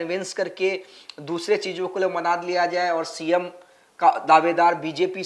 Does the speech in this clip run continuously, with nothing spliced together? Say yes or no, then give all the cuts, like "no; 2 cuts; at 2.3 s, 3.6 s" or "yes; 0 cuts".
yes; 0 cuts